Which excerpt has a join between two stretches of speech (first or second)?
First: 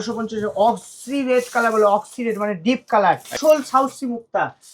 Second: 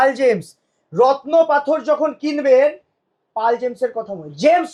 first